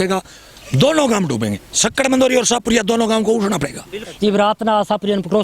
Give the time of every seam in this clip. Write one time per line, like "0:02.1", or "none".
0:04.0